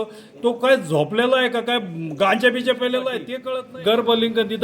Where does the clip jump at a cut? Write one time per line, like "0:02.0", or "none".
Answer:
0:03.3

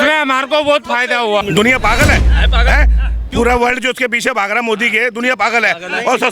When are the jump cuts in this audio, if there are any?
0:01.4

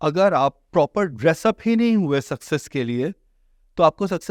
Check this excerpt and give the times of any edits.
none

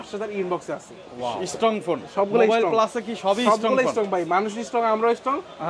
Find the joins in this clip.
0:01.4

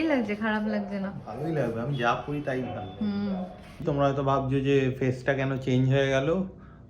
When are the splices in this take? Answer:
0:03.7

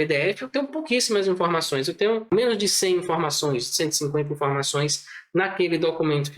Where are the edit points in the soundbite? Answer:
0:02.3

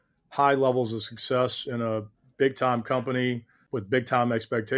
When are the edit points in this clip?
0:03.6

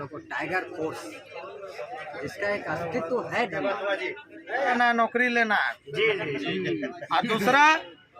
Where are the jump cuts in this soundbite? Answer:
0:04.7

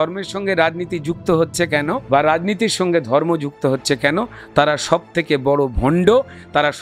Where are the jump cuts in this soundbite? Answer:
0:02.0

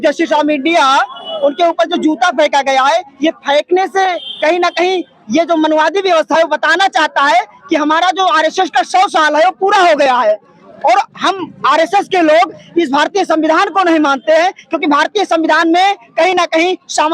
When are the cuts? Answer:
none

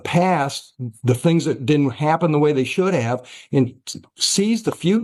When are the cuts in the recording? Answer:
none

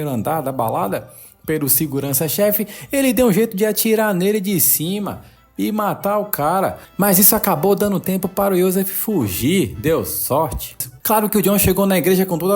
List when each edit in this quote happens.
0:10.9

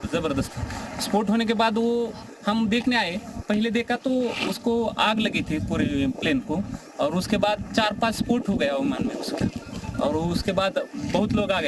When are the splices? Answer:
0:00.9

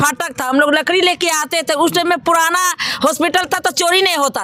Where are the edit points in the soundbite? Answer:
none

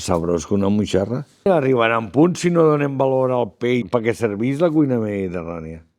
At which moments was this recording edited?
0:01.5
0:03.8

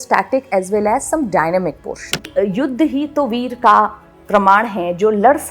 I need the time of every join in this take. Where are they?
0:02.3

